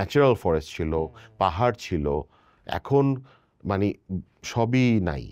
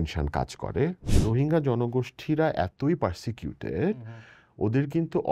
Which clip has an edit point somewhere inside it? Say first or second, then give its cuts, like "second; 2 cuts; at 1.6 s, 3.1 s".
second; 1 cut; at 1.2 s